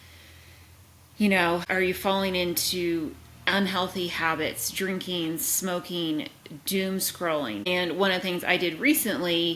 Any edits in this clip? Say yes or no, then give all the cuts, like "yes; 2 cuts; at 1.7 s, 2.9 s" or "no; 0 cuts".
yes; 2 cuts; at 1.7 s, 7.7 s